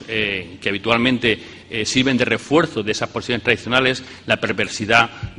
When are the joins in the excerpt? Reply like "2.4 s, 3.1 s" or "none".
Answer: 3.7 s